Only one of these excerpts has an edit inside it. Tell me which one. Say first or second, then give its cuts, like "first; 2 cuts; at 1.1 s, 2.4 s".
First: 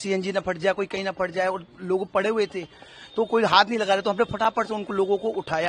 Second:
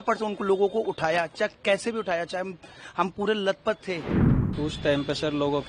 second; 1 cut; at 4.2 s